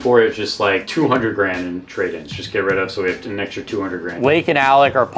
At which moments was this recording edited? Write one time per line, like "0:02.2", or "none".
0:04.1